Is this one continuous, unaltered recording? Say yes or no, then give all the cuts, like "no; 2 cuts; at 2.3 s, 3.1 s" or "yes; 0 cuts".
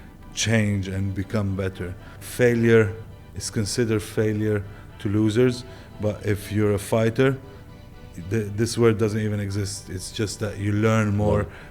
no; 1 cut; at 2.2 s